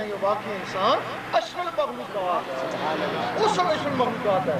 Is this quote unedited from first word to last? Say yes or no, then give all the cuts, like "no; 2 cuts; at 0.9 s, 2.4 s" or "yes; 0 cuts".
yes; 0 cuts